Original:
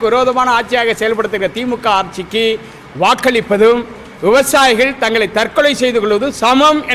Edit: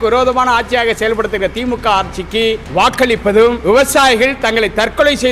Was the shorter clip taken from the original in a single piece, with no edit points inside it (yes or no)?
no